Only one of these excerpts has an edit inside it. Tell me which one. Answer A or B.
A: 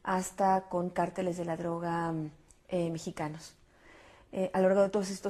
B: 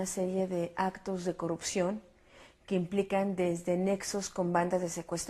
B